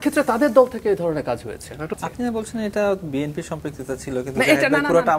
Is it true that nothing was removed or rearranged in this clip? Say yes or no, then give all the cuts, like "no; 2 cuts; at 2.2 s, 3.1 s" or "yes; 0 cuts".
no; 1 cut; at 1.9 s